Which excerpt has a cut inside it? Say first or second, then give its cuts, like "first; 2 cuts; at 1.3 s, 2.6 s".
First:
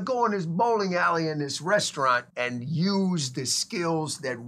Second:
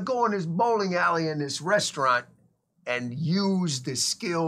first; 1 cut; at 2.3 s